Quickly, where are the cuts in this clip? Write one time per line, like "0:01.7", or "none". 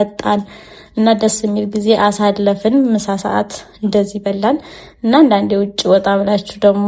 none